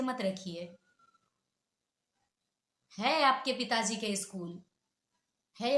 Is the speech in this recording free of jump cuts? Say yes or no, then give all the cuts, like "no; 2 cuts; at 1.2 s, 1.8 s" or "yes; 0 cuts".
yes; 0 cuts